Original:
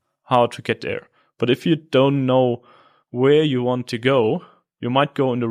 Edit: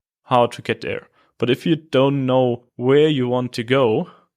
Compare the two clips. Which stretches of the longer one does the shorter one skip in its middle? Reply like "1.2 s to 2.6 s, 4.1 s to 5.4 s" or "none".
2.7 s to 3.0 s